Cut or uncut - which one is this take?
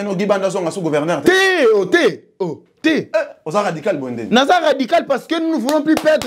uncut